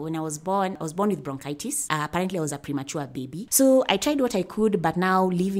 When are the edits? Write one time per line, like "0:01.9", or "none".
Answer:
0:00.8
0:01.8
0:03.4